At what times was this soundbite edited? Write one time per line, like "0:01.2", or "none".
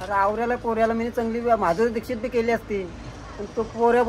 none